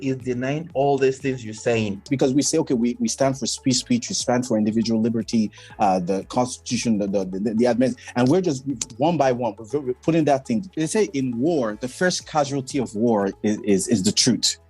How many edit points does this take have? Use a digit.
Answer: 3